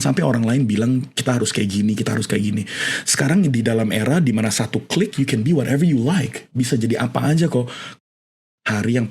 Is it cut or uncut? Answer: cut